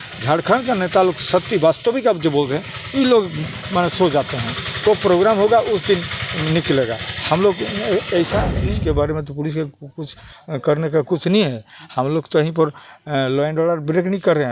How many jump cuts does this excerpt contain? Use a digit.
1